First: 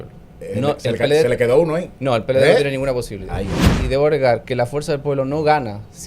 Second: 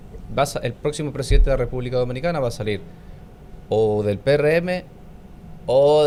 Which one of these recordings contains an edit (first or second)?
first